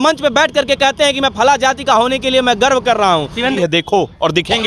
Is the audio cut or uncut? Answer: cut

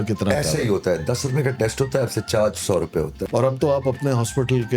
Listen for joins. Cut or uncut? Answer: cut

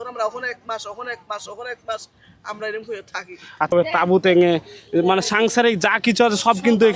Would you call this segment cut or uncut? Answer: uncut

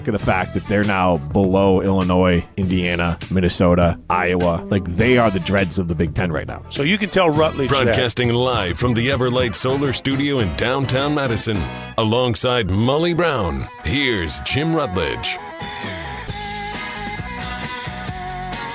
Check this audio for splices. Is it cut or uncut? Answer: cut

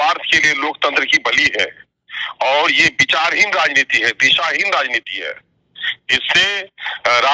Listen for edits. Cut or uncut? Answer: uncut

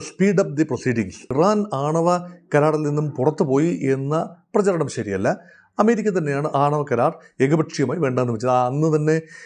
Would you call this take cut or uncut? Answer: cut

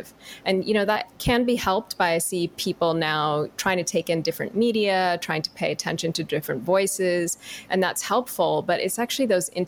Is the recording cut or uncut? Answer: cut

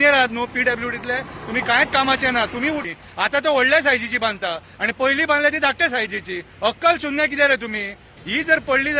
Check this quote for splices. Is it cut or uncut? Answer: cut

